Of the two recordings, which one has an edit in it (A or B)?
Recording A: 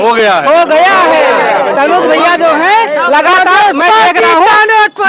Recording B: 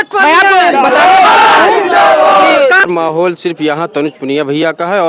B